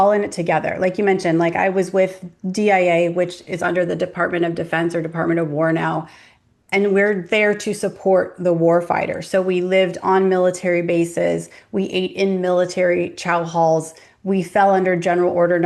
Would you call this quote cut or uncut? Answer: uncut